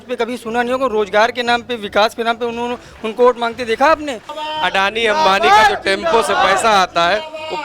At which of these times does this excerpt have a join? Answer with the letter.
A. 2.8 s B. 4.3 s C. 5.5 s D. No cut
B